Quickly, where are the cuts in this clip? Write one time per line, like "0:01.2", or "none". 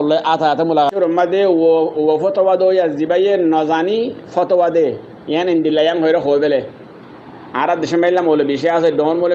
0:00.9